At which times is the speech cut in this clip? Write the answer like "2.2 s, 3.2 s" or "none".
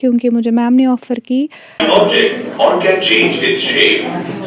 1.8 s

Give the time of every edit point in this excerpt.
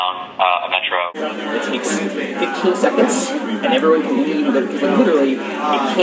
1.1 s

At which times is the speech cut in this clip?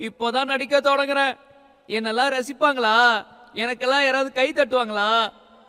none

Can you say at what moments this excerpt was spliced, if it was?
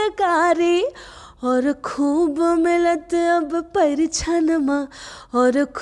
none

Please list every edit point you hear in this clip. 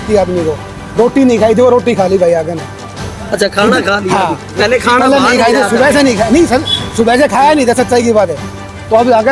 none

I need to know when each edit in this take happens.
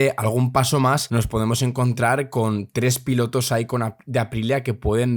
1.0 s

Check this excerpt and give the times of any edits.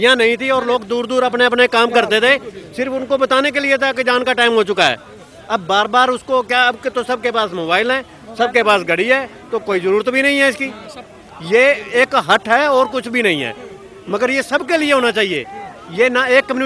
none

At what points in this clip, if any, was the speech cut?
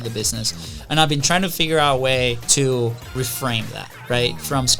2.4 s, 3.1 s

